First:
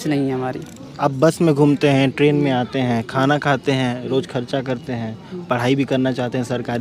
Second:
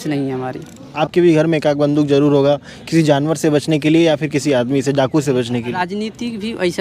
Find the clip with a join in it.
second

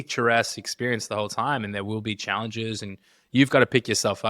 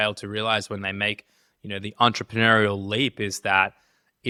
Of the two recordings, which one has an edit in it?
first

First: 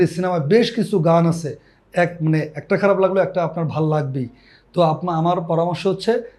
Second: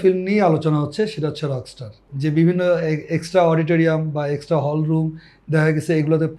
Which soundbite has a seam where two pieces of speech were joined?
second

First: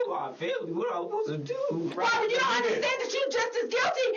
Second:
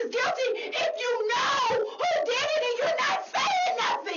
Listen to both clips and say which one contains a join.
first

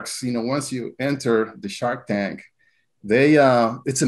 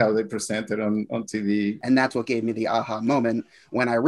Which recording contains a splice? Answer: second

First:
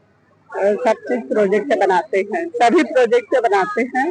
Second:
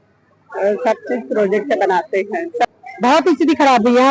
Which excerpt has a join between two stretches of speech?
second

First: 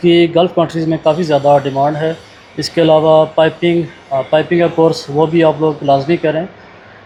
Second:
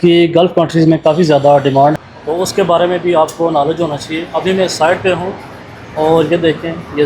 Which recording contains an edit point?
second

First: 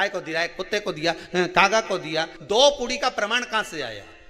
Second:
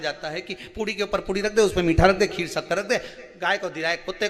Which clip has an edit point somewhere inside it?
first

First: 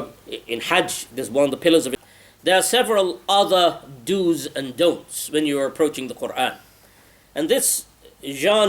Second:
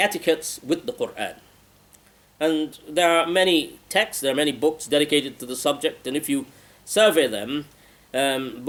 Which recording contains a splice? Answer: first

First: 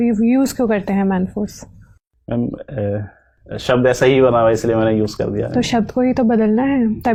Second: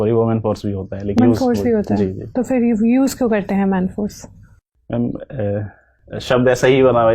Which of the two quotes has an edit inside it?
second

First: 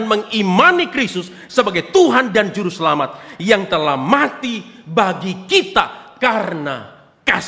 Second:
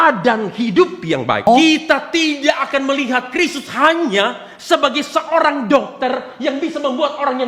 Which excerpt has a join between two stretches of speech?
second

